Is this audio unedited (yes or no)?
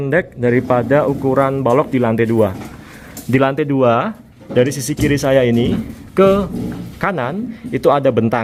yes